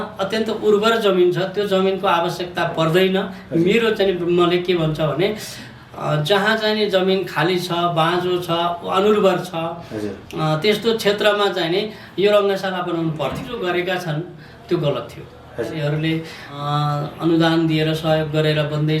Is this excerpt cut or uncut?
cut